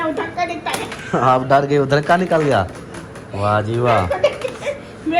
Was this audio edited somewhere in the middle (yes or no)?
no